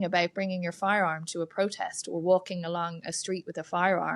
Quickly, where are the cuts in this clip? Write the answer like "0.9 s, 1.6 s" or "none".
none